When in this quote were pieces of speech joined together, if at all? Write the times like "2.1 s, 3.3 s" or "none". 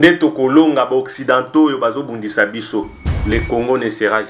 3.0 s